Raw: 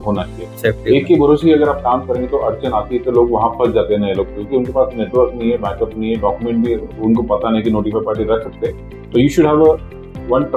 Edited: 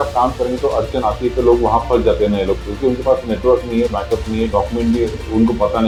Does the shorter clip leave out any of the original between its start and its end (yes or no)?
no